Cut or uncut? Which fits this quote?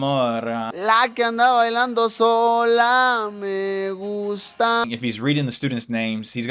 cut